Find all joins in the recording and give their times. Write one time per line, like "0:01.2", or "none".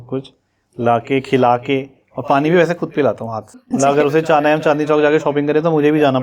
0:03.7